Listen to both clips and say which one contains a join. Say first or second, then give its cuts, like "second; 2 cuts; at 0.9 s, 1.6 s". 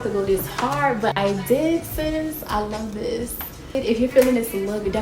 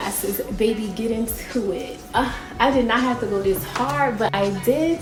first; 1 cut; at 3.8 s